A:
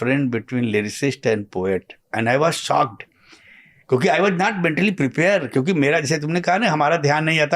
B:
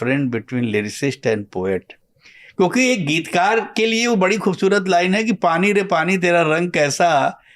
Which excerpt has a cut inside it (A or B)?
B